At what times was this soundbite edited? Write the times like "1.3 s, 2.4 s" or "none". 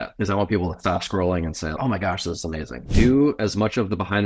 2.7 s